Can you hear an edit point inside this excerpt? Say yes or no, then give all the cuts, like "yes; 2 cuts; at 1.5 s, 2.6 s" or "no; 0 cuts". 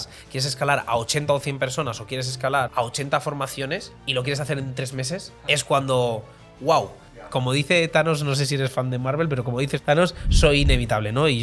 yes; 5 cuts; at 2.7 s, 4.0 s, 5.3 s, 7.3 s, 9.8 s